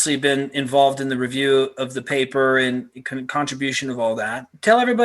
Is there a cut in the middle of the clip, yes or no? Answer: no